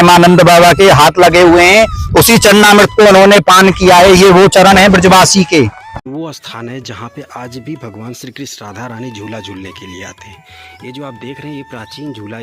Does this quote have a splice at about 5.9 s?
yes; 1 cut; at 5.9 s

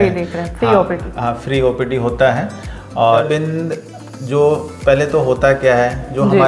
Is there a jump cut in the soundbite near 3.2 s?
yes; 1 cut; at 3.2 s

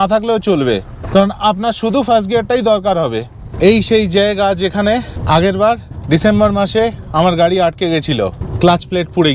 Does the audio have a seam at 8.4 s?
yes; 2 cuts; at 3.4 s, 8.4 s

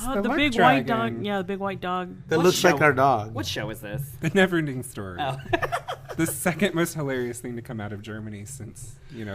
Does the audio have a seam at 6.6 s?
yes; 1 cut; at 6.6 s

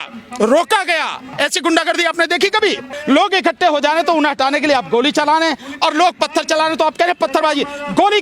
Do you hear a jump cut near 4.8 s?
no; 2 cuts; at 1.3 s, 2.9 s

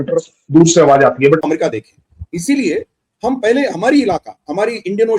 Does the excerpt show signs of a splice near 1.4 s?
yes; 1 cut; at 1.4 s

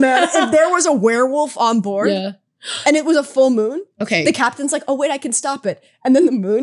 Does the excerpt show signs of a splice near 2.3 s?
no; 0 cuts

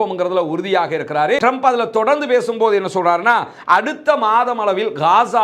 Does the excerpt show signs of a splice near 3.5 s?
no; 1 cut; at 1.4 s

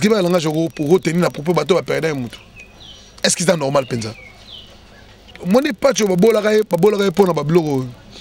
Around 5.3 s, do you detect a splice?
yes; 1 cut; at 5.3 s

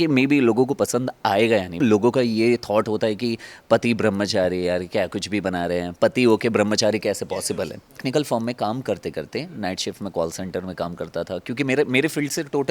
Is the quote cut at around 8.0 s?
yes; 2 cuts; at 1.7 s, 8.0 s

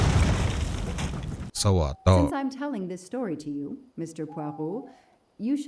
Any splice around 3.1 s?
no; 1 cut; at 1.5 s

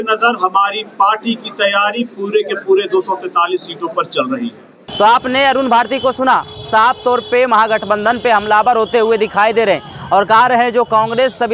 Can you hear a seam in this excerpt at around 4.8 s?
no; 0 cuts

